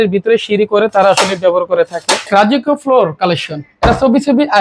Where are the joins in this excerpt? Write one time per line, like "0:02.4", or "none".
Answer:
0:02.3